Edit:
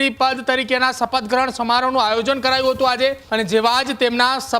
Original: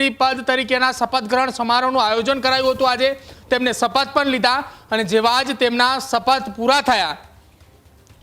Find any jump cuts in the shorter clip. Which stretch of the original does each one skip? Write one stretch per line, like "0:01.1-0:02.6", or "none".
0:03.2-0:04.8